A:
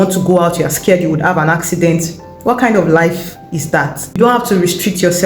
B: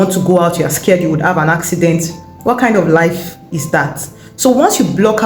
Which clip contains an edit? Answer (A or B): A